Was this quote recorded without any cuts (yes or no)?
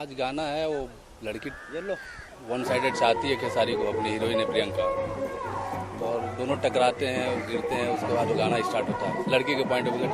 no